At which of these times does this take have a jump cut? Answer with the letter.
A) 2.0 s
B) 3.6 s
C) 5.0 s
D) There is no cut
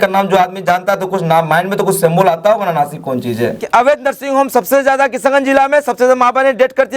B